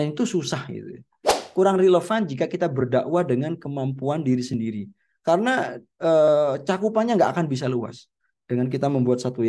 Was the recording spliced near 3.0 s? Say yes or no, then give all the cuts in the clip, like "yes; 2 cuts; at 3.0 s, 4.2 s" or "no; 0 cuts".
no; 1 cut; at 1.4 s